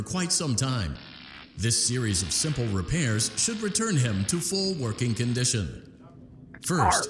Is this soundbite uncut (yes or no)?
yes